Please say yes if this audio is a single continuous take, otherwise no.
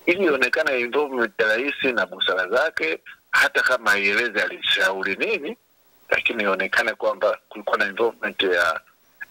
yes